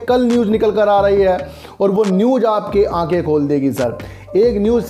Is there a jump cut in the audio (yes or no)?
no